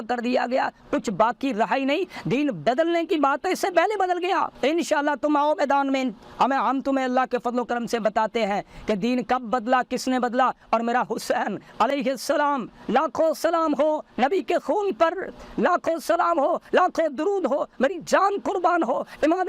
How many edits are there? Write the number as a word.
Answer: zero